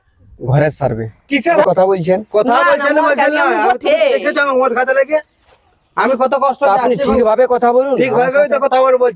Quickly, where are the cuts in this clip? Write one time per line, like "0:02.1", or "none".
0:01.6

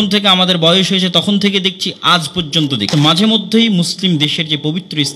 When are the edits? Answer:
0:02.9

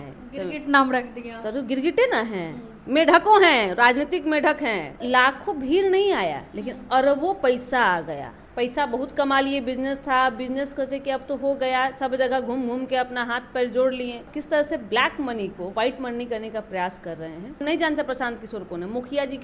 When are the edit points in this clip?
0:05.0
0:08.4
0:14.3
0:17.6

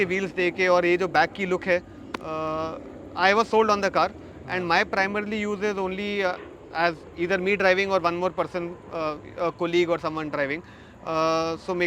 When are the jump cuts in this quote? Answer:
none

